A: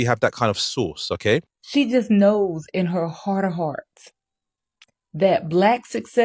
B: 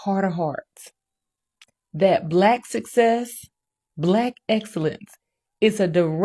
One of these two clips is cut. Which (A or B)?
A